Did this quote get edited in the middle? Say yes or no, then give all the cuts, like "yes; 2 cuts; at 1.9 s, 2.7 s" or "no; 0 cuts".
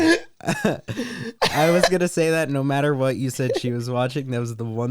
yes; 1 cut; at 1.2 s